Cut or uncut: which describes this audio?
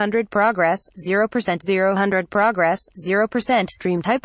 uncut